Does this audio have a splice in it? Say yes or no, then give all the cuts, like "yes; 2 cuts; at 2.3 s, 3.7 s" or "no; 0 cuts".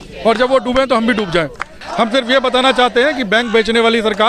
yes; 1 cut; at 1.8 s